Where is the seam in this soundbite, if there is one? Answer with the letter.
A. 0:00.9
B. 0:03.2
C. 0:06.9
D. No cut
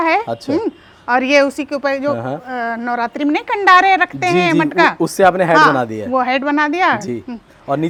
D